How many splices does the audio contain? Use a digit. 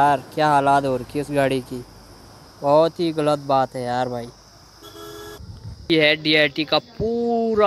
1